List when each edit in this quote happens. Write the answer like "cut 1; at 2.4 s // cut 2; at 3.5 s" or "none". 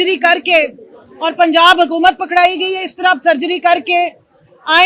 none